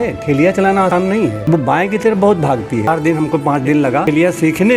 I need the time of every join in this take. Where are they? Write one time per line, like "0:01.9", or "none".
0:00.9
0:02.9
0:04.0